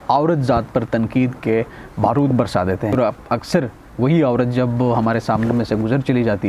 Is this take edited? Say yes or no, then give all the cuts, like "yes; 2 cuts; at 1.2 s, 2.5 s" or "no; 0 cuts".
yes; 1 cut; at 3.0 s